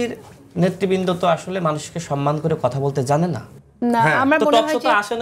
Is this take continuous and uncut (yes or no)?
no